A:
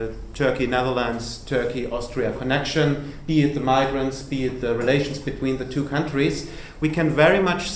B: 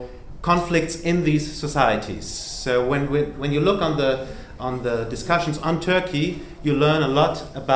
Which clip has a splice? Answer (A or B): B